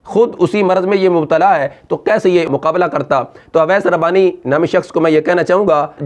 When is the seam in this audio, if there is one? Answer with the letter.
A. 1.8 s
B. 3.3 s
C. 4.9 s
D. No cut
B